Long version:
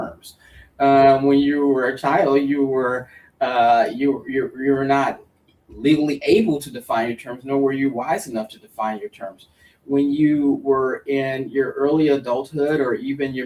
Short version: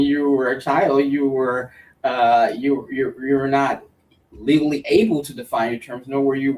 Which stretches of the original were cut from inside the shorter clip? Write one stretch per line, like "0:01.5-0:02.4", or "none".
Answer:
none